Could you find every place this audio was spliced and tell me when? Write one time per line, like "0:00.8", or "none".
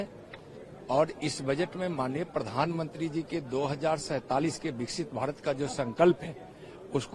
none